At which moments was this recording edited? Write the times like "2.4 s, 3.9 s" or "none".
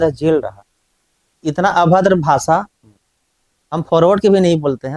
1.3 s